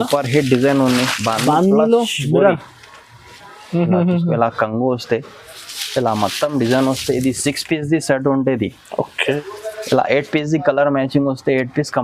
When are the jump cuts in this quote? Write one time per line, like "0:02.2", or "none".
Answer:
0:09.2